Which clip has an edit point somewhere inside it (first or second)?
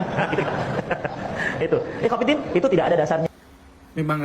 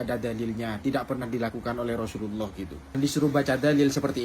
second